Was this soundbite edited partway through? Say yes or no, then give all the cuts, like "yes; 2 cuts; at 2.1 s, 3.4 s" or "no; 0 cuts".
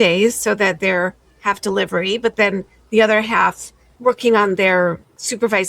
yes; 1 cut; at 3.9 s